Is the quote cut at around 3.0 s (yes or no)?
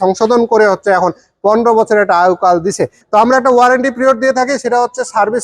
yes